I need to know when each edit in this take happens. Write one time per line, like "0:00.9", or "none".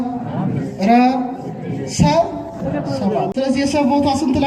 0:03.3